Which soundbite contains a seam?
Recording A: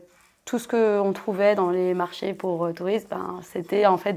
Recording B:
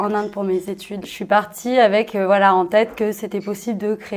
B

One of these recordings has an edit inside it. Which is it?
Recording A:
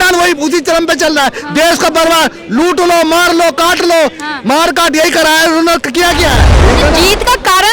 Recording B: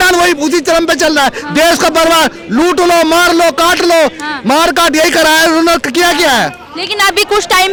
A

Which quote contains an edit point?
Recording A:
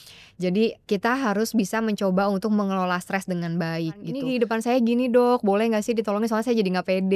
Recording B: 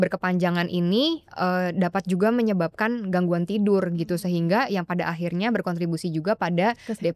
A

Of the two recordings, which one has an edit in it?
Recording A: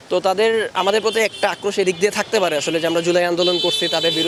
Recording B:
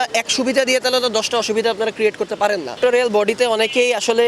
B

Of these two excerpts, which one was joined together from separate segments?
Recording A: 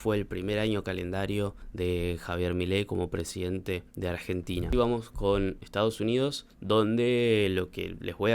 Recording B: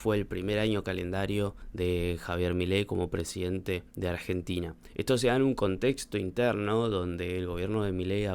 A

